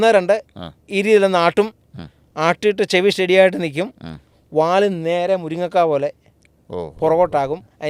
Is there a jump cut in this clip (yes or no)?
no